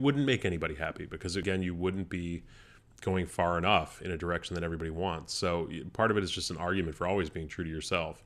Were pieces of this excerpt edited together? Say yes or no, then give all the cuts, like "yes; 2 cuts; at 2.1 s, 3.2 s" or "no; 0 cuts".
yes; 1 cut; at 1.4 s